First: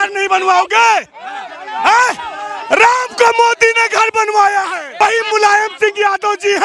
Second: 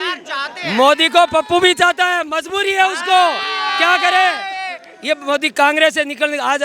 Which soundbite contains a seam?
first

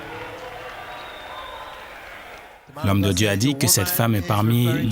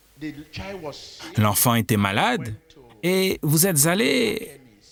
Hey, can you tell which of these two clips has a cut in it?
first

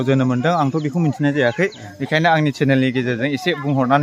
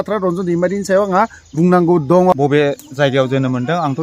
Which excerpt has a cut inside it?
second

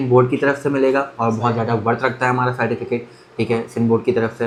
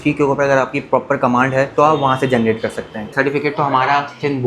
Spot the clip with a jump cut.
second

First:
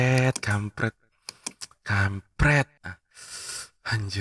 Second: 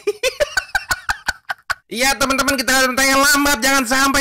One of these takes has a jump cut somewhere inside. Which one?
second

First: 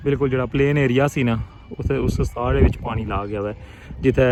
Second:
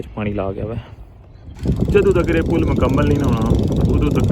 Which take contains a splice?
second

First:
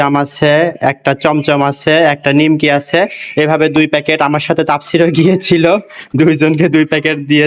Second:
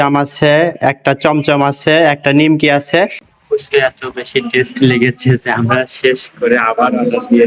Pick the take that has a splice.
second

